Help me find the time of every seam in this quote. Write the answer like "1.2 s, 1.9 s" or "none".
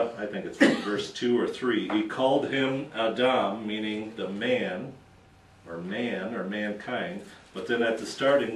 3.6 s